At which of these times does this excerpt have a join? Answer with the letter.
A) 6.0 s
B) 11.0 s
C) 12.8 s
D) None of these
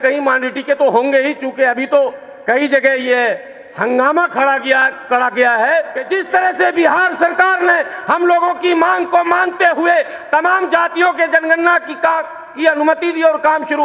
A